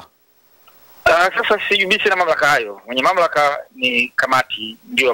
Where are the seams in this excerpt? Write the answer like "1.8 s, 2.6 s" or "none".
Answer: none